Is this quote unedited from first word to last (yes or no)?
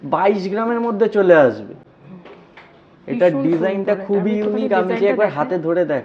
yes